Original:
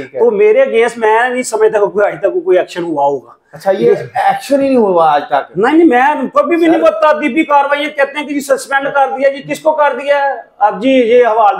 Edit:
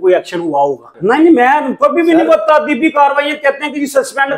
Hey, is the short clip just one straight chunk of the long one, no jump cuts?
no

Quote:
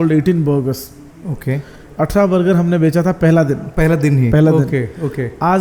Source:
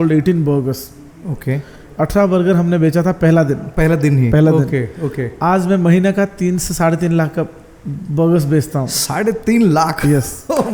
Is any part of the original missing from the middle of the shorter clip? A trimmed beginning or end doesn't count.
no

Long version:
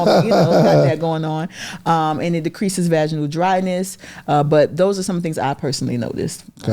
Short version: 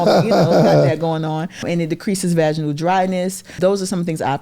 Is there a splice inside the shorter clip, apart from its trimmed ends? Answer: yes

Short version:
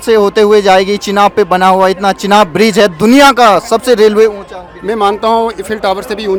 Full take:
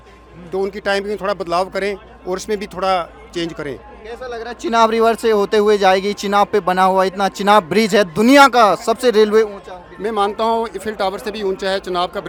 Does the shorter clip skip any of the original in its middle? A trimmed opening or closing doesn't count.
no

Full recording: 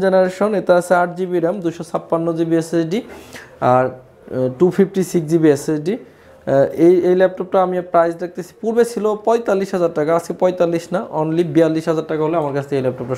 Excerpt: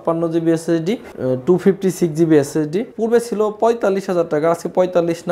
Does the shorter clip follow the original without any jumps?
no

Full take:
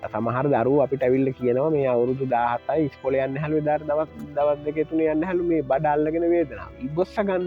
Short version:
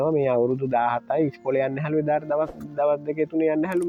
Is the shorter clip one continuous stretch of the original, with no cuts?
yes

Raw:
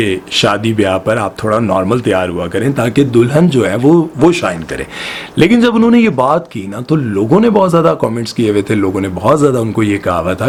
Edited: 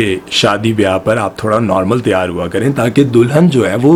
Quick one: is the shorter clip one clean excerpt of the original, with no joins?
yes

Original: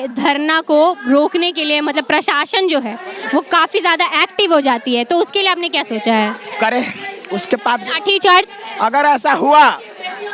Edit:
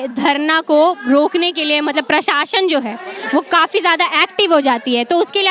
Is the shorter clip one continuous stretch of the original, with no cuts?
yes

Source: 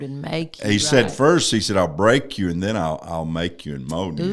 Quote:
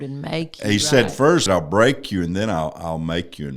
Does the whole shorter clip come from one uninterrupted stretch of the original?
no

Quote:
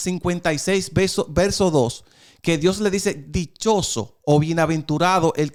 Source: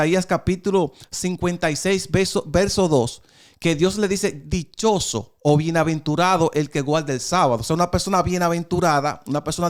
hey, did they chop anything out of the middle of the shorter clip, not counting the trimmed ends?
no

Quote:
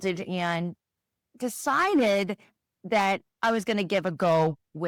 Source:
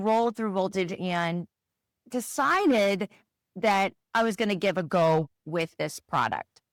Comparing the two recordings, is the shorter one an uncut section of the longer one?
yes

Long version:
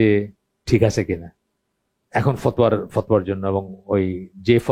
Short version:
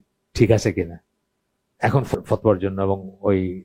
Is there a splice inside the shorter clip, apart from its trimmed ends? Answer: yes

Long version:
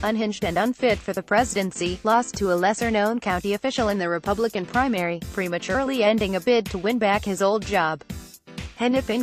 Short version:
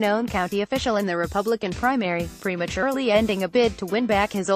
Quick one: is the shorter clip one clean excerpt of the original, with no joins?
yes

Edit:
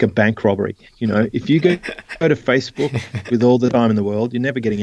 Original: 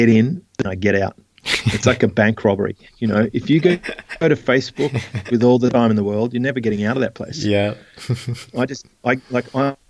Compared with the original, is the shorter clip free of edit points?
yes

